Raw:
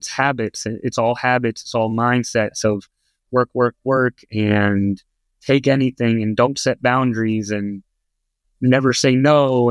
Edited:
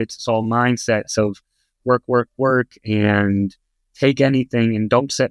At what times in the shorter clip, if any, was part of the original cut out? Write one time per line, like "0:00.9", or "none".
none